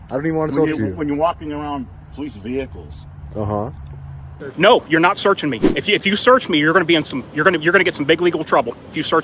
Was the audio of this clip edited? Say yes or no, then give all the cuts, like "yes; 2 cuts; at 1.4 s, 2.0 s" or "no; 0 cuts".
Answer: yes; 1 cut; at 4.3 s